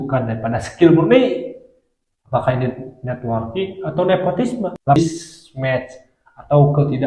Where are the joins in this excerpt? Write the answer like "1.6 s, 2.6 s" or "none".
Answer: 5.0 s